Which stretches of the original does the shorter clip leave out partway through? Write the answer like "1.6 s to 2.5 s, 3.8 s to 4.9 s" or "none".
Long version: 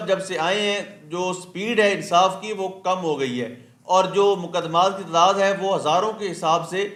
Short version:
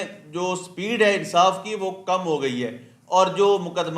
none